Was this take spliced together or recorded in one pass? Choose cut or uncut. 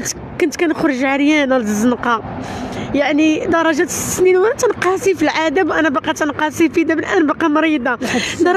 uncut